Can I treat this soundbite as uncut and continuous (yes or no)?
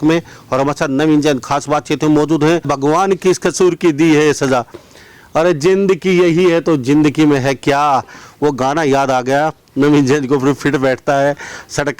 no